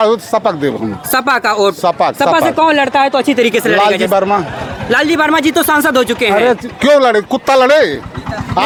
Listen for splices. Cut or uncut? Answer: uncut